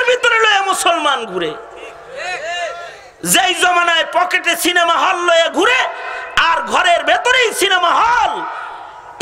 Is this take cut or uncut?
uncut